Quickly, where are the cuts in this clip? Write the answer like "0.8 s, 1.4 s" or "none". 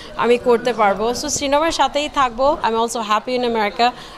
2.6 s

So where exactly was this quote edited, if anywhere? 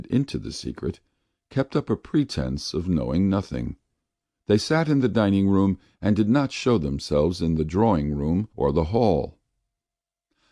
none

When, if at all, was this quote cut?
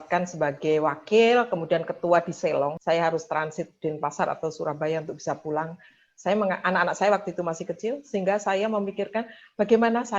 2.8 s

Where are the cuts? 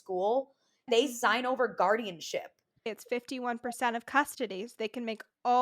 0.8 s, 2.9 s

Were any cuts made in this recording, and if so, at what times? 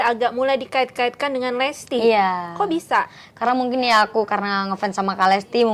none

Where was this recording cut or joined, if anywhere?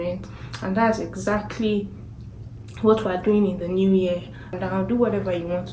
4.5 s

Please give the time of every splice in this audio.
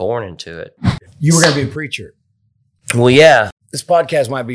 1.1 s, 3.6 s

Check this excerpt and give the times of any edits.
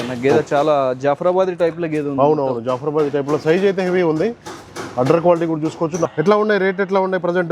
6.1 s

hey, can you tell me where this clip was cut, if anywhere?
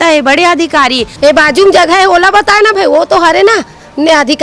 1.1 s

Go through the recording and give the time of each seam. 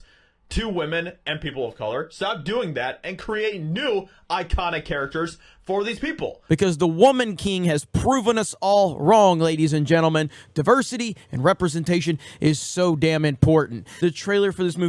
6.3 s, 13.8 s

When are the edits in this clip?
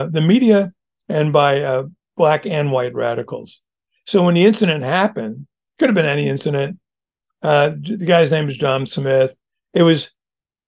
none

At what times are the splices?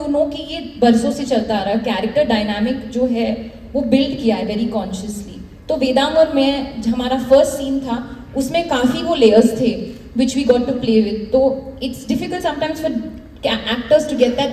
none

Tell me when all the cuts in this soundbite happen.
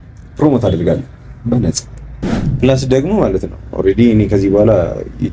2.4 s

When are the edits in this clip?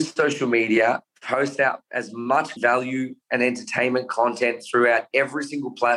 2.5 s

